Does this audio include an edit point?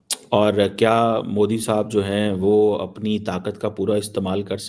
no; 0 cuts

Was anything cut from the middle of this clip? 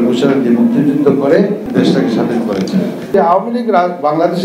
yes; 2 cuts; at 1.6 s, 3.1 s

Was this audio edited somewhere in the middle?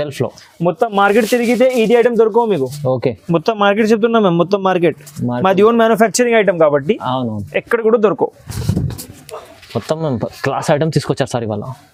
no; 0 cuts

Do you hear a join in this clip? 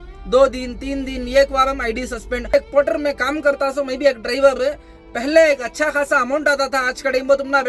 yes; 1 cut; at 2.5 s

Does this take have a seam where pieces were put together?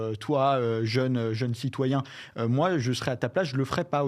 no; 0 cuts

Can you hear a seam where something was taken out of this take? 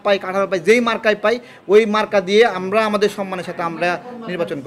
no; 0 cuts

